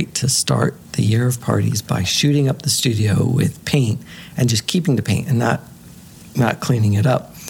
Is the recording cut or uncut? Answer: uncut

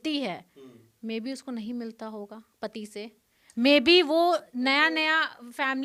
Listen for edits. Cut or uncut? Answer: uncut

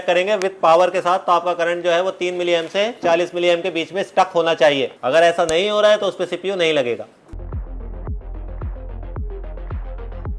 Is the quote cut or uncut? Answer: uncut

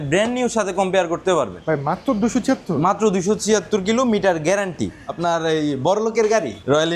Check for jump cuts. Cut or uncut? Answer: cut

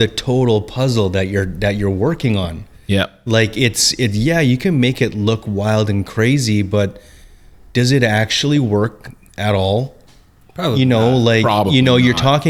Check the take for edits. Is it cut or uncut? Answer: uncut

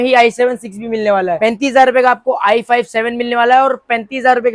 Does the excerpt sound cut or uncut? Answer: uncut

